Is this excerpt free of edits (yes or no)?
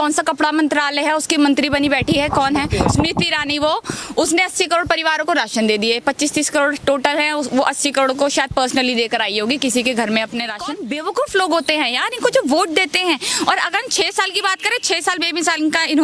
no